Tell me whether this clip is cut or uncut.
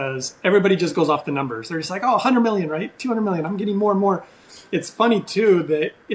uncut